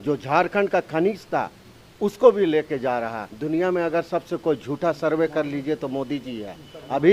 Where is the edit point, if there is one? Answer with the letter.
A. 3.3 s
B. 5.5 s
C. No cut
A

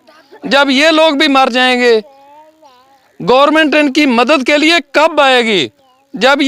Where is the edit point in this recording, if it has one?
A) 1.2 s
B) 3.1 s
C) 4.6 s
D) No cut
D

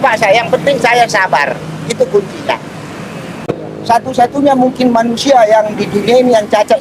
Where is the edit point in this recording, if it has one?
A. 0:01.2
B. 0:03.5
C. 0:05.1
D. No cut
B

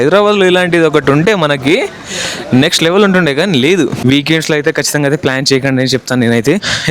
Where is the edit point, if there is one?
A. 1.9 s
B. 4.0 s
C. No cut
B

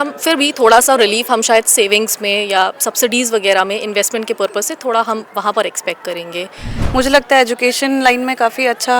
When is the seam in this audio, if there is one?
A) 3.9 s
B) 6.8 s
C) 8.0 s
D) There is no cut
B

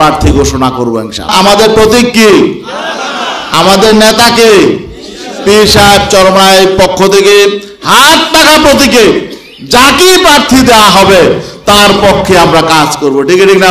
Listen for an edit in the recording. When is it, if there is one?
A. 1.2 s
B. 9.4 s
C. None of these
A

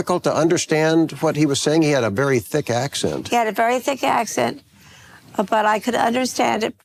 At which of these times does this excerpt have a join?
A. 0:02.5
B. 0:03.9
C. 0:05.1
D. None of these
D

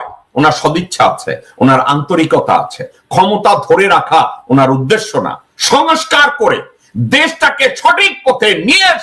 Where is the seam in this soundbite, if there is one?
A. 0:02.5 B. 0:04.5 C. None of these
C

